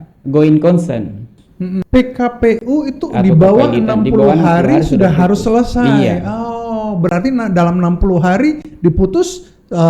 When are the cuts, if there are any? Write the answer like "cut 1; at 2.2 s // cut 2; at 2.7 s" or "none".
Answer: cut 1; at 1.8 s

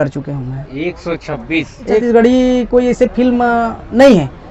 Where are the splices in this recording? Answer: cut 1; at 1.9 s

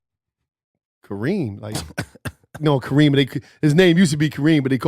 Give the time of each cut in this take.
none

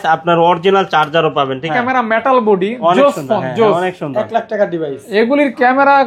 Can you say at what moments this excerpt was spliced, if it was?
cut 1; at 1.7 s

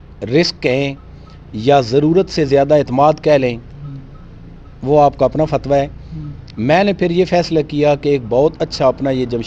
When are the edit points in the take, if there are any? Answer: none

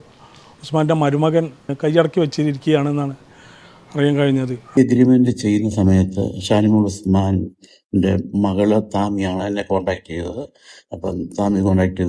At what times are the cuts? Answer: cut 1; at 1.7 s // cut 2; at 4.8 s

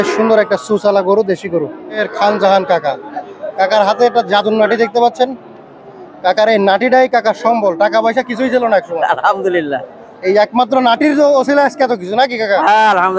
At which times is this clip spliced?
cut 1; at 2.1 s

